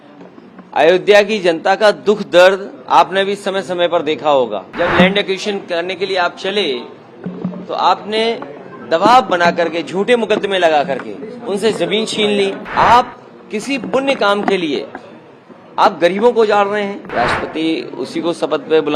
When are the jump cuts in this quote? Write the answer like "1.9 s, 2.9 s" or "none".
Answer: 4.7 s, 12.6 s, 17.1 s